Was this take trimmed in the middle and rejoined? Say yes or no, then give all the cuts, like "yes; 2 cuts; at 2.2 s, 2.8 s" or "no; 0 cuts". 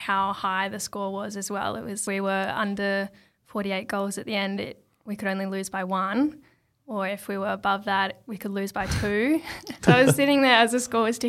yes; 2 cuts; at 2.0 s, 9.7 s